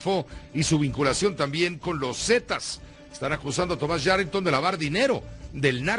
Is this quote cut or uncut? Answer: uncut